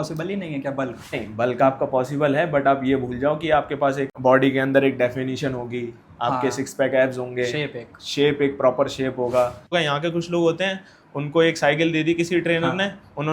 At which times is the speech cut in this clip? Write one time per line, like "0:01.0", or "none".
0:01.2
0:04.1
0:09.7